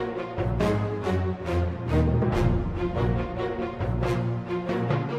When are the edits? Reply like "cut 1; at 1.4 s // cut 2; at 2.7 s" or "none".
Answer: cut 1; at 0.9 s